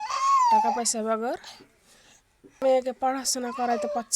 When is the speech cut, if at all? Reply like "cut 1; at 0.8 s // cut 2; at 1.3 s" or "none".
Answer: cut 1; at 2.6 s